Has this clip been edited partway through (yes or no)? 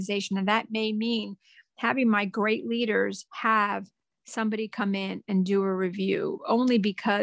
yes